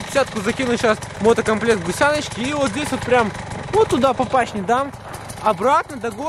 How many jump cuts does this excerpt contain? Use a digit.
1